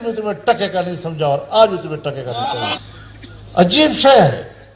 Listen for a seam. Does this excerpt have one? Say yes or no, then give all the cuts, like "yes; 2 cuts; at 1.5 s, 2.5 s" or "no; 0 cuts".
yes; 1 cut; at 2.8 s